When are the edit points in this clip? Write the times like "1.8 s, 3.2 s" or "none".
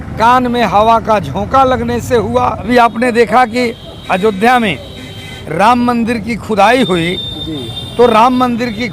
2.7 s